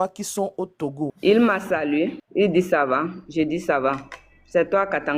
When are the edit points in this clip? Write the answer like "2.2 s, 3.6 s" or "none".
1.1 s, 2.2 s